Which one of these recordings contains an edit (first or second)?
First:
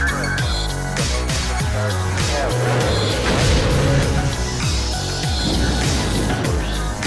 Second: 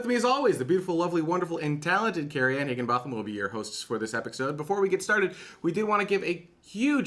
second